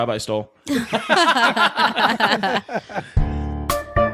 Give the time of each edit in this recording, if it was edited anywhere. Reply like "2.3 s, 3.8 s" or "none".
3.0 s

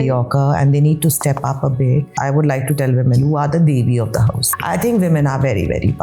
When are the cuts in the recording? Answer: 2.1 s, 3.2 s, 4.5 s

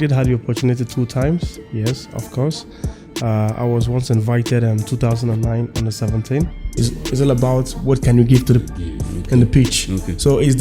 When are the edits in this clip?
6.8 s

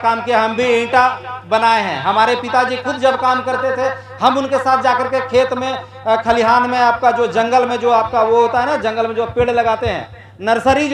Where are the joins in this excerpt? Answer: none

